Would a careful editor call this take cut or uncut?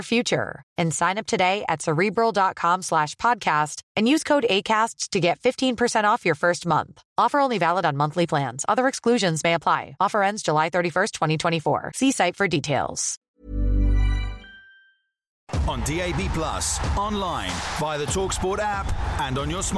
cut